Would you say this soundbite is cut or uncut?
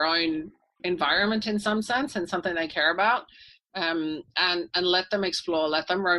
uncut